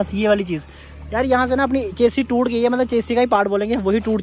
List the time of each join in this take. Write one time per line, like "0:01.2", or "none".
none